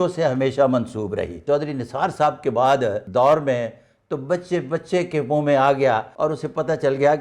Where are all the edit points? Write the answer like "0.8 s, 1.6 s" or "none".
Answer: 1.3 s, 3.0 s, 6.1 s